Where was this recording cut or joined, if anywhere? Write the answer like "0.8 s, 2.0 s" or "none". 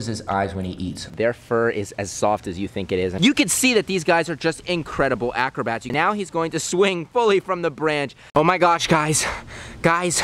1.1 s, 3.4 s, 5.9 s, 8.2 s